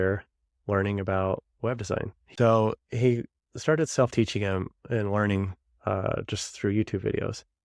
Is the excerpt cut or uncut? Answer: cut